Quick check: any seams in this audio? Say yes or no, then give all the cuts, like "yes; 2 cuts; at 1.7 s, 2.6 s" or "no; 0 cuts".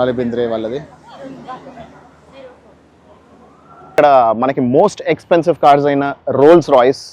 yes; 1 cut; at 3.9 s